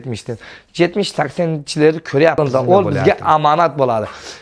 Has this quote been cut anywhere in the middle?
yes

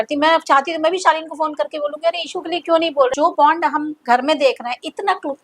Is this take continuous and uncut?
no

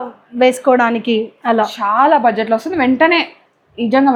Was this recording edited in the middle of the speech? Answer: no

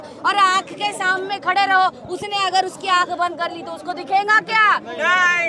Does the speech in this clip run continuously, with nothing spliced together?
yes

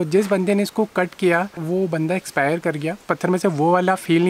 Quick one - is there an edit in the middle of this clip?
yes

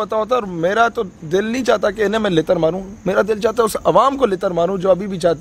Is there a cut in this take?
no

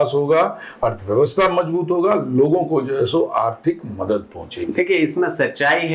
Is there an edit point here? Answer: no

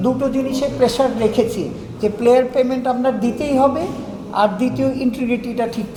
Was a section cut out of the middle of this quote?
no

